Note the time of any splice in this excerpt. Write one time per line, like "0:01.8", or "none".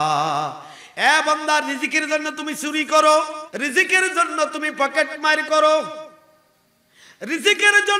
0:03.4